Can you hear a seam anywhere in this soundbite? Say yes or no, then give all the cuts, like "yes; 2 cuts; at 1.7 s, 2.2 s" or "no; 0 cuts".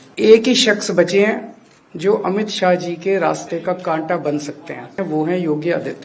yes; 1 cut; at 4.9 s